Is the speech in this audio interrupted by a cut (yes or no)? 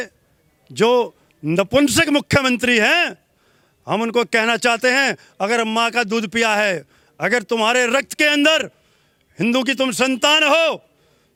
no